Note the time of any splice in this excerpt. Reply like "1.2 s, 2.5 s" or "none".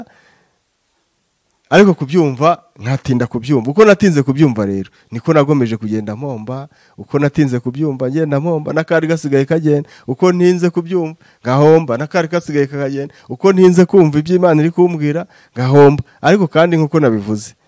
none